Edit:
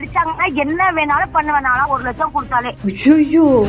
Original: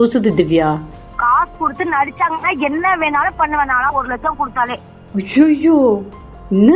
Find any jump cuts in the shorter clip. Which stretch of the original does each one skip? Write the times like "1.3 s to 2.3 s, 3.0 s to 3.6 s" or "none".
4.8 s to 5.0 s